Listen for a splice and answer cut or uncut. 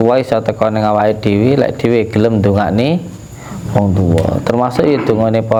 uncut